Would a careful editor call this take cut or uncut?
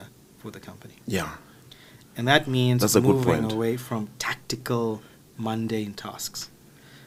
uncut